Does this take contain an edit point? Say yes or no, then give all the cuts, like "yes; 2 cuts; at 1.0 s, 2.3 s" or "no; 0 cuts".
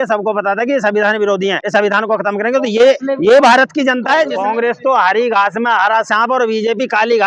yes; 2 cuts; at 1.6 s, 4.3 s